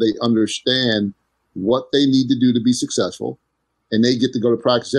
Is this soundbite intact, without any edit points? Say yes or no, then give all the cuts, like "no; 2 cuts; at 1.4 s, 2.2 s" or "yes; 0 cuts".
yes; 0 cuts